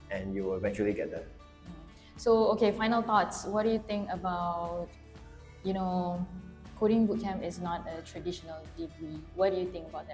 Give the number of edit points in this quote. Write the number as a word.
zero